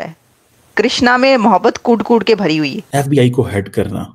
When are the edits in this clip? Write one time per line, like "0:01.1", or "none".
0:02.8